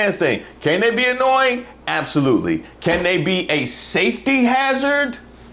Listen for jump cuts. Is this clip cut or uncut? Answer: uncut